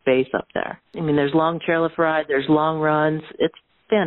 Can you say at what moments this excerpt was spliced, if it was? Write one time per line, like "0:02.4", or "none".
0:00.9

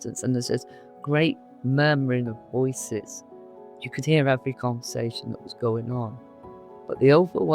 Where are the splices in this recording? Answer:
0:03.6
0:06.7

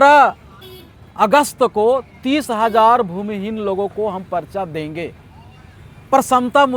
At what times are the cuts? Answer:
none

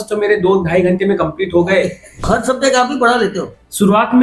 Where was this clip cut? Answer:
0:02.2

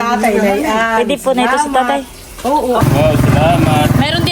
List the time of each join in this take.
0:02.8

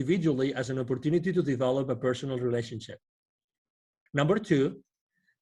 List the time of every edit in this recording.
0:04.0

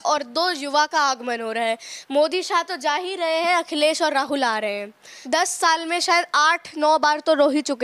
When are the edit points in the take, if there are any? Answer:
0:05.1

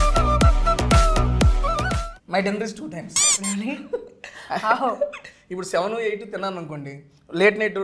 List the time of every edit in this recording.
0:02.0

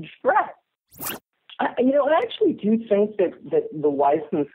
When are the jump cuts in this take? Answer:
0:01.0

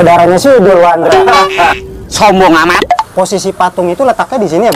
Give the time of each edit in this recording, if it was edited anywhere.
0:03.1

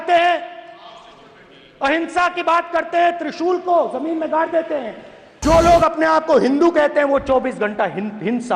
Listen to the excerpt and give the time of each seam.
0:05.4

